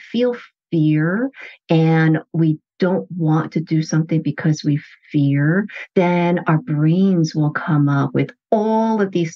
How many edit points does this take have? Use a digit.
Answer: 0